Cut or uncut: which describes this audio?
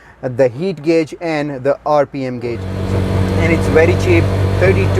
cut